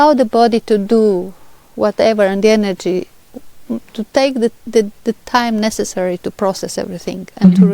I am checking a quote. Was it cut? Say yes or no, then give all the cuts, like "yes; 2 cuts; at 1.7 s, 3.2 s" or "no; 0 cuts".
no; 0 cuts